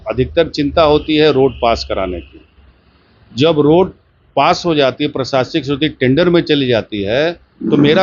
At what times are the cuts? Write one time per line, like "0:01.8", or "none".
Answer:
none